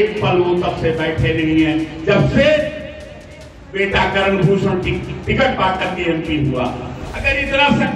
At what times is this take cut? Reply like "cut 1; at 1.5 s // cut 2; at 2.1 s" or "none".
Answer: cut 1; at 7.1 s